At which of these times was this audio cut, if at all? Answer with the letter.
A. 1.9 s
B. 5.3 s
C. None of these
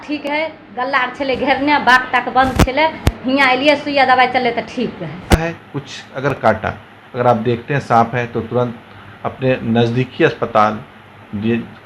B